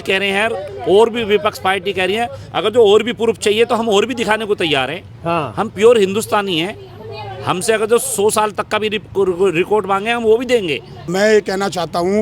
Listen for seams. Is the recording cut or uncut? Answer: cut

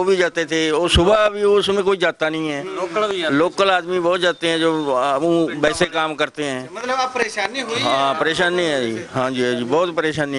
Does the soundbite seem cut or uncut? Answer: uncut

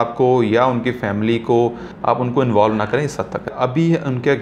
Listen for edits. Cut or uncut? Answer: cut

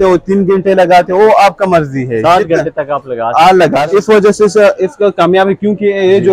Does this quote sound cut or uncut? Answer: cut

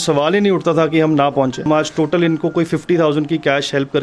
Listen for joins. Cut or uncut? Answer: cut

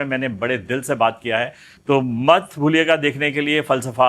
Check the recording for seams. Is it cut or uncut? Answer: uncut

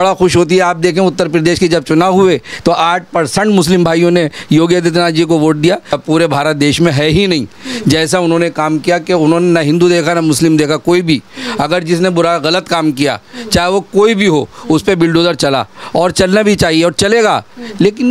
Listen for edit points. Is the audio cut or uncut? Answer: cut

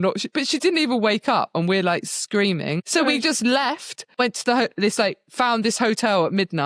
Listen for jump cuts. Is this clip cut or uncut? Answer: cut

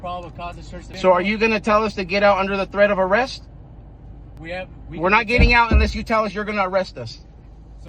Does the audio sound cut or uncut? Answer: cut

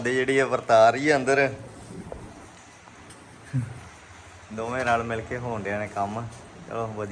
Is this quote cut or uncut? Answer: uncut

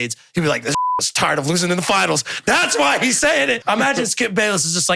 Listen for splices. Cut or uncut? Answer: cut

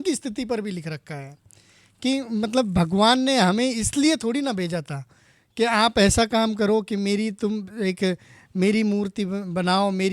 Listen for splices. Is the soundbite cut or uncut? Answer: uncut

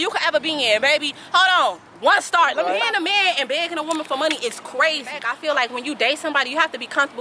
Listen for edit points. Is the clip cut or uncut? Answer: cut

